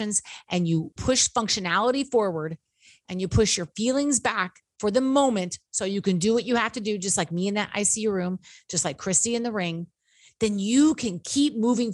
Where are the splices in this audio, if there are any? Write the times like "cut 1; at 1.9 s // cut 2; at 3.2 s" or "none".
cut 1; at 0.9 s